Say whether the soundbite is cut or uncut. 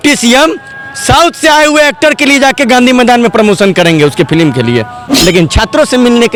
uncut